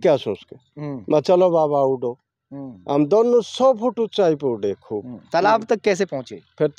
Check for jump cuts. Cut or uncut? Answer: uncut